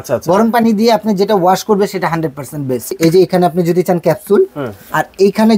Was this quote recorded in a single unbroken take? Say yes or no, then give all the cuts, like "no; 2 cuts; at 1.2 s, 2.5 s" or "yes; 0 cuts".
no; 1 cut; at 2.9 s